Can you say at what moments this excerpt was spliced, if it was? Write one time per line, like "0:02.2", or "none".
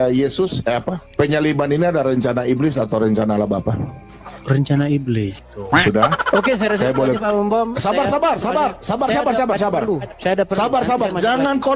0:05.4